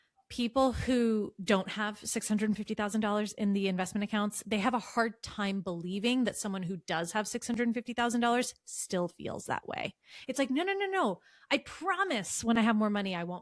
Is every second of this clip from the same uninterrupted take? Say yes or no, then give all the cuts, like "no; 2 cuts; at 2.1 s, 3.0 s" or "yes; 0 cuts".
yes; 0 cuts